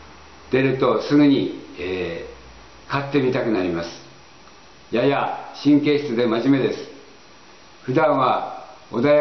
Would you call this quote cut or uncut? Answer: uncut